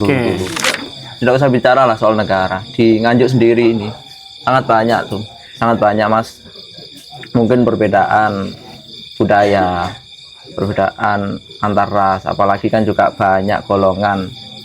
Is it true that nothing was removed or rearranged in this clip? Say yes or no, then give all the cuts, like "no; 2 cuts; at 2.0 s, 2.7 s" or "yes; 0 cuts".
no; 1 cut; at 1.0 s